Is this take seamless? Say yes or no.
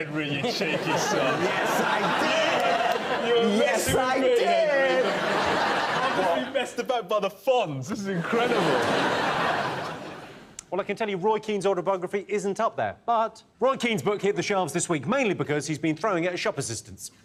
yes